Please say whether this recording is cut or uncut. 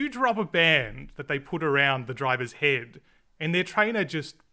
uncut